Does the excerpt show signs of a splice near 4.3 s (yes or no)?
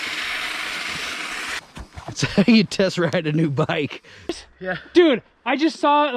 yes